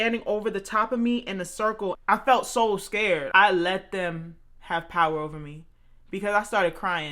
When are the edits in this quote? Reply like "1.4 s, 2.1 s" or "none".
2.0 s, 3.2 s

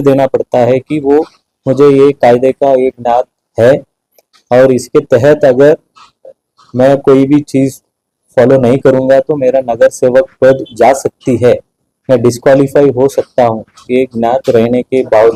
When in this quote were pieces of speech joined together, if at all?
none

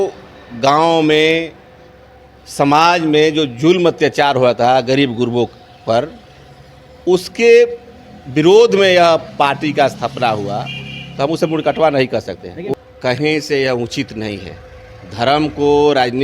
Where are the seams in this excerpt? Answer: 12.7 s

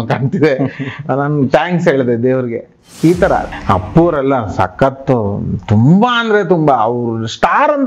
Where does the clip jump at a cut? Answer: 3.5 s

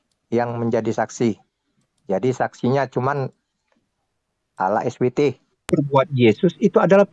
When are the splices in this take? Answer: 5.7 s

